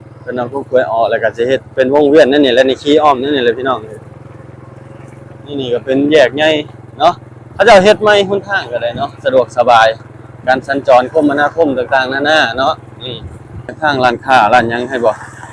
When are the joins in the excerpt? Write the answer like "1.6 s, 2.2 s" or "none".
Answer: 13.7 s

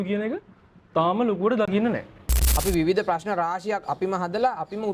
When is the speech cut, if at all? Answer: 2.4 s

